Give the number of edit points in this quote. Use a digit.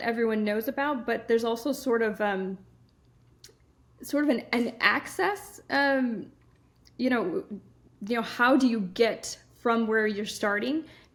0